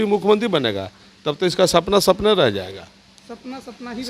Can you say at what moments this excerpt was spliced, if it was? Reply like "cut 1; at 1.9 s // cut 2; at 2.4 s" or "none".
none